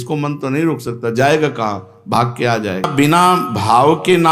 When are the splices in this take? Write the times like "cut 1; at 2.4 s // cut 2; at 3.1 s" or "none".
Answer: cut 1; at 2.9 s